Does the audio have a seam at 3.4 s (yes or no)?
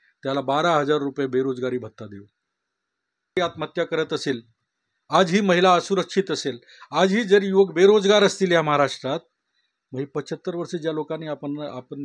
yes